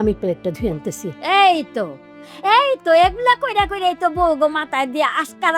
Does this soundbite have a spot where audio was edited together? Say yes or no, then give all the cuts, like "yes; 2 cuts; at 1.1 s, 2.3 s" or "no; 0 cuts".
no; 0 cuts